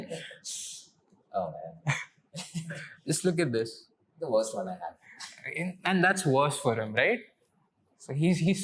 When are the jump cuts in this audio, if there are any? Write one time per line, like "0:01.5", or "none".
none